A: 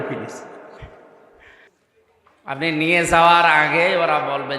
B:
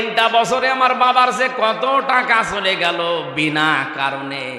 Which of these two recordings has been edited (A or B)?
A